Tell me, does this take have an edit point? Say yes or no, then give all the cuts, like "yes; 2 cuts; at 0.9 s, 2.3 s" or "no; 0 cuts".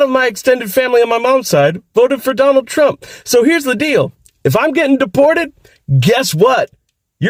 no; 0 cuts